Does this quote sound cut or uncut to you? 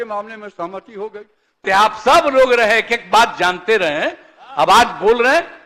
cut